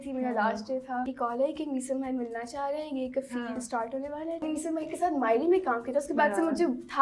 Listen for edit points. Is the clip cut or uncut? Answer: cut